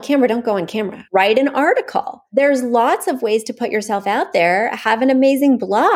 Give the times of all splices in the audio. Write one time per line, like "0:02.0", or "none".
0:01.0
0:02.2